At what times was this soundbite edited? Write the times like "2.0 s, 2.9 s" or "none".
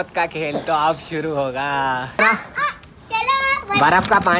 2.2 s